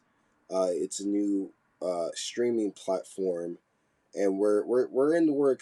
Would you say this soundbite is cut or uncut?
uncut